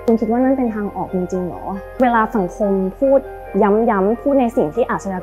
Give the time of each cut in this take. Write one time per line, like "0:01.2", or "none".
0:01.9